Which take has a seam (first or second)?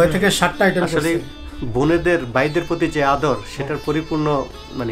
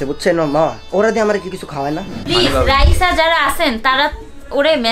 second